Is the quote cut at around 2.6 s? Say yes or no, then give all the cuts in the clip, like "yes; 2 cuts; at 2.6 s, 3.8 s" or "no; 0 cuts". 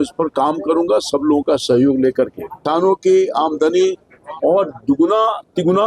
yes; 1 cut; at 2.6 s